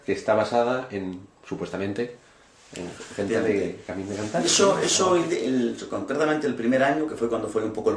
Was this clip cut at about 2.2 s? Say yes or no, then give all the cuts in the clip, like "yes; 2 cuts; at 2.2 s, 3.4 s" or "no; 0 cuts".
no; 1 cut; at 5.9 s